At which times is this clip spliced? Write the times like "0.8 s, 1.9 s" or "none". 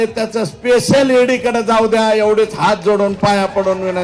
none